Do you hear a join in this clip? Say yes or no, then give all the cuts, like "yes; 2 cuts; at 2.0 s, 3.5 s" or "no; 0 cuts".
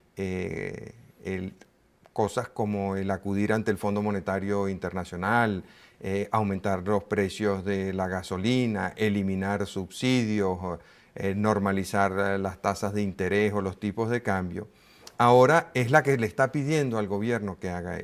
no; 0 cuts